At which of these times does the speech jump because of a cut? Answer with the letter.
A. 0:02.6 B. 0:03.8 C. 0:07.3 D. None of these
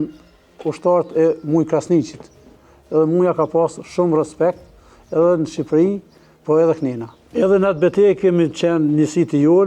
D